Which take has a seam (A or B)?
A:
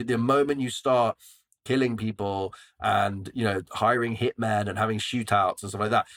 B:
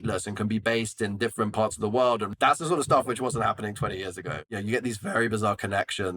B